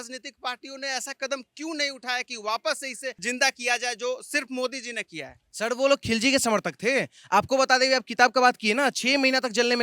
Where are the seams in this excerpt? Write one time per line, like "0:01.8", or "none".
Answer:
0:03.2